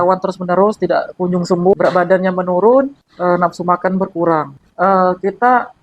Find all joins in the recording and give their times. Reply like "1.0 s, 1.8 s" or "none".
1.7 s, 3.0 s, 4.6 s

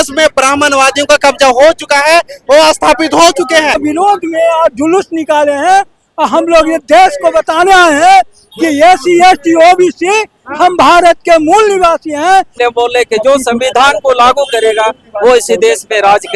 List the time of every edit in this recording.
3.8 s, 12.5 s

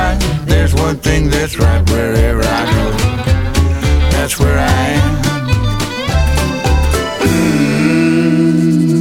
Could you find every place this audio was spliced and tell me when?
none

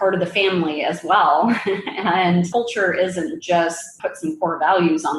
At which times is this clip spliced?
none

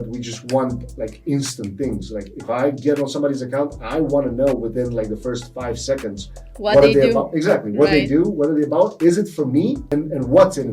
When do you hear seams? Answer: 9.8 s

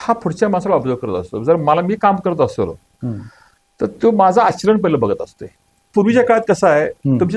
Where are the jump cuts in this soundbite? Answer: 5.9 s

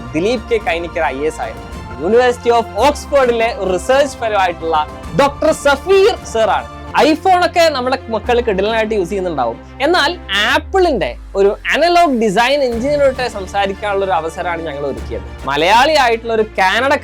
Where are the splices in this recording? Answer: 1.9 s, 6.8 s, 15.4 s

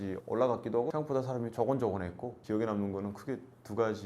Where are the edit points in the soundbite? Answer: 0.9 s

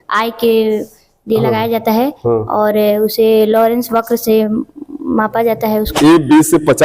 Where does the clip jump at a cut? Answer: 5.9 s

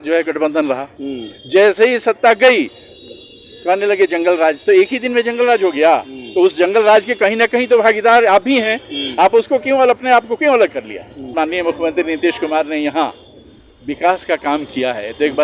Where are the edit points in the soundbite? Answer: 11.3 s

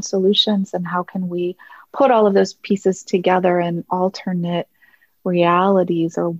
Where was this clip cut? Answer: none

